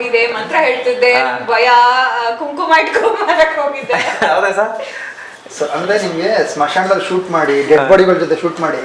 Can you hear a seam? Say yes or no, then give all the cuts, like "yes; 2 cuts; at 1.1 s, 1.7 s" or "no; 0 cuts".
no; 0 cuts